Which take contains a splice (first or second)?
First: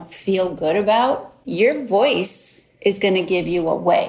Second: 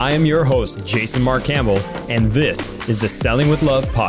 first